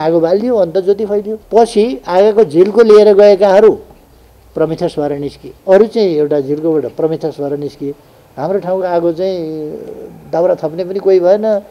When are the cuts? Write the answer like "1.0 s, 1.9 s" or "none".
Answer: 1.4 s, 5.5 s